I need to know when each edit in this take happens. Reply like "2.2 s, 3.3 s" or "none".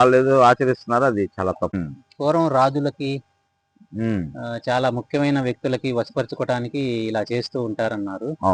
1.8 s